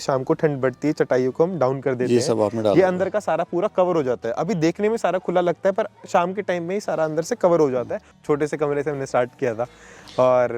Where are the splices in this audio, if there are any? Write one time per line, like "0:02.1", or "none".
0:08.1

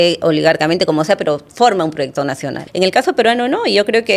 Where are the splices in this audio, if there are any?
0:02.6

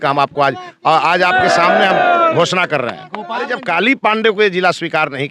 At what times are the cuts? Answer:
0:03.4

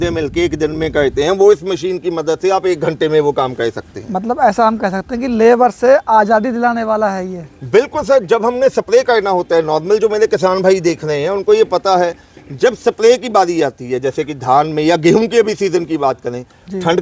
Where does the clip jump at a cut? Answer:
none

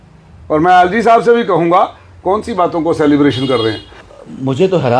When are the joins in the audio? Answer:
0:04.0

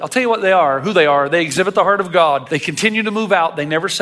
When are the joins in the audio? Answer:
0:02.5

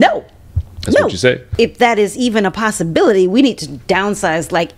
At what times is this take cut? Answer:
0:01.5

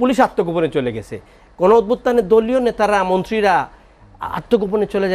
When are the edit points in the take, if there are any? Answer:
none

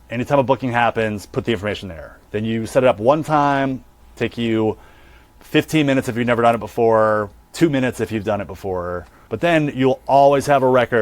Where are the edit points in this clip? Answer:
0:05.3
0:09.1

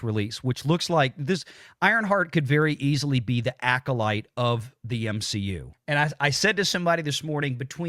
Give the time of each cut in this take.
0:05.7

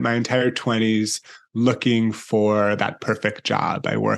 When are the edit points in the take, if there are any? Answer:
none

